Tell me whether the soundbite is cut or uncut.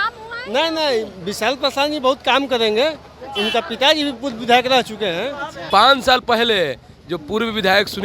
cut